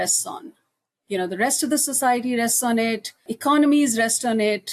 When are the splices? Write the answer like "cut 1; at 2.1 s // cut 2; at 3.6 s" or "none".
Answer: cut 1; at 3.3 s